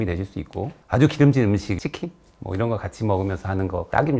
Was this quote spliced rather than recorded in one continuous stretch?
no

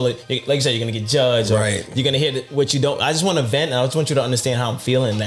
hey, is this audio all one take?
yes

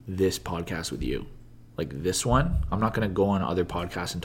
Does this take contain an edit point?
no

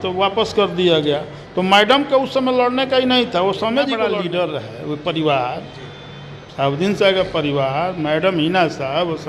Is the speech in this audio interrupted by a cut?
yes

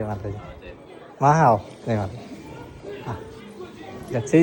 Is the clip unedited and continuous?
yes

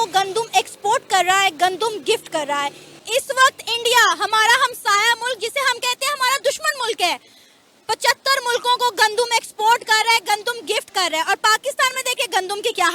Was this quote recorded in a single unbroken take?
yes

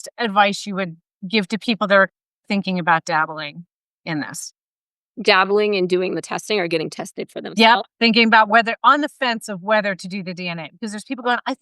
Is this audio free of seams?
yes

